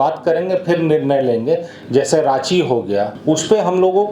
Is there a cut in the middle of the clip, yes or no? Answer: yes